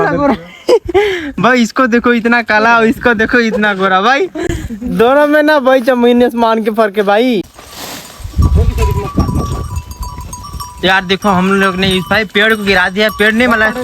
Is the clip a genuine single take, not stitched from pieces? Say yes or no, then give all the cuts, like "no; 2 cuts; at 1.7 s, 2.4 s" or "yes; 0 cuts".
no; 1 cut; at 7.6 s